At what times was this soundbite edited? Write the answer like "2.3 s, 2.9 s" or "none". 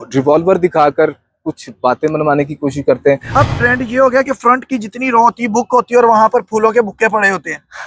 3.2 s